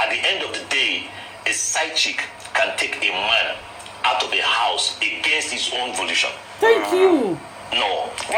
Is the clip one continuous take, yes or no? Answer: yes